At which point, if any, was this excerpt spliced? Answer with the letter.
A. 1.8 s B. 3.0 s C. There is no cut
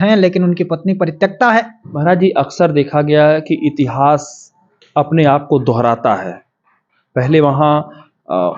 A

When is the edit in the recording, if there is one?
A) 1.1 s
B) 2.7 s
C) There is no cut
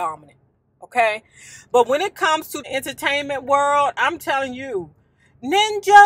B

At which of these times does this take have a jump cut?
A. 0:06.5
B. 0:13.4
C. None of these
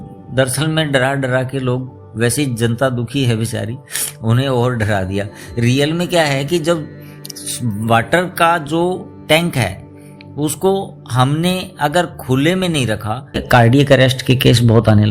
B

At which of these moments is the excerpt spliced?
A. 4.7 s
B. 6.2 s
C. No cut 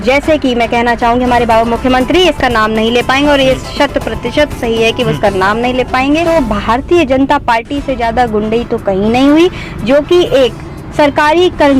B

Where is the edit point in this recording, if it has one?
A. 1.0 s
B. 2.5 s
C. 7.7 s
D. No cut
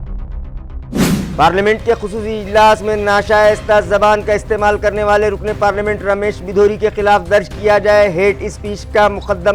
A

